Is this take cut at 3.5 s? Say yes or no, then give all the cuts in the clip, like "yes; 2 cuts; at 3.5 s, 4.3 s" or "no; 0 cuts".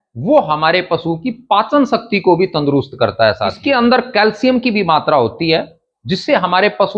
yes; 1 cut; at 3.5 s